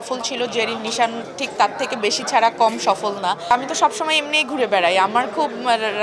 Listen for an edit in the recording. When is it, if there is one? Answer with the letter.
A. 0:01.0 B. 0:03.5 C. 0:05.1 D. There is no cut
B